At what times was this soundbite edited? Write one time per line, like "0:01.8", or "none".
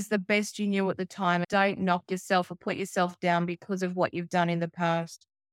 0:01.5